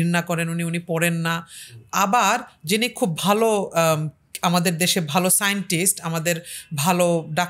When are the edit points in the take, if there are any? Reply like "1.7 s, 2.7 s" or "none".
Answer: none